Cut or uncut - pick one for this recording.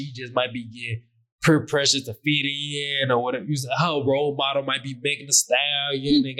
uncut